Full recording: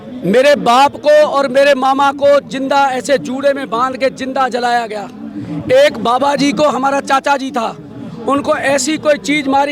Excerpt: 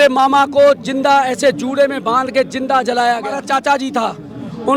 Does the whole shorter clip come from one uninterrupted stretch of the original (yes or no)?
no